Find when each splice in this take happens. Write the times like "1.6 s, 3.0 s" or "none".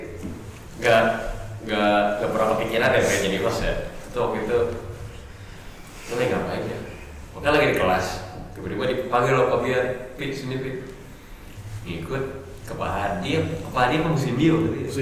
none

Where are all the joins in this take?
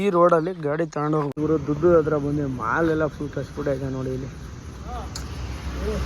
1.3 s

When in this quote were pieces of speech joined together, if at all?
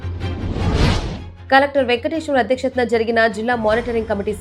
1.3 s

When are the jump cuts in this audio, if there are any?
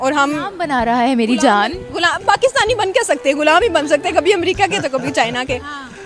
none

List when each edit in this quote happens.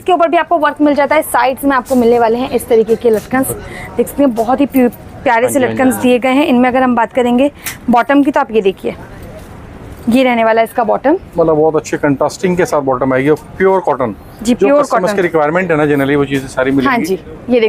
none

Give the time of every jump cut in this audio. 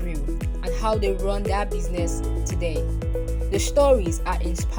none

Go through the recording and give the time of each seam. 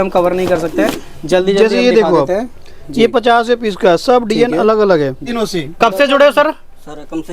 5.2 s

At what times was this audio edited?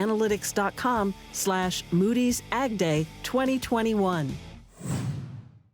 4.8 s

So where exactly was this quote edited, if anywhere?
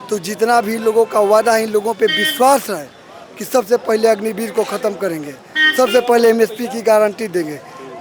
none

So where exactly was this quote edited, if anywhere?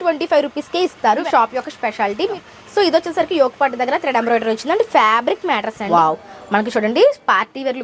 1.2 s, 2.3 s, 5.8 s

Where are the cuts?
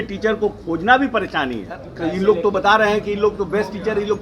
1.9 s

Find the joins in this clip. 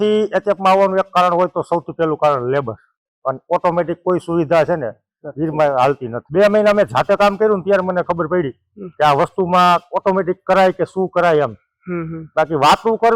6.1 s

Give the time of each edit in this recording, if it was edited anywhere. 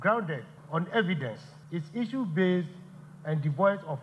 none

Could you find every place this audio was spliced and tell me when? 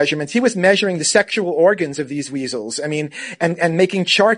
none

